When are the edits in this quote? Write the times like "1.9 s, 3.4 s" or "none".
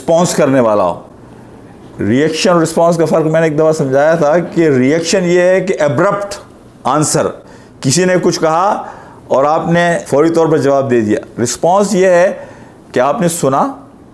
none